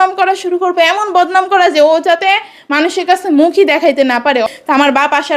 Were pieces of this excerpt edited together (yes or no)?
yes